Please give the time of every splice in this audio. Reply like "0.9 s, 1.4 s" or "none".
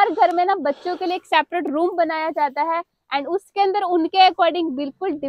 none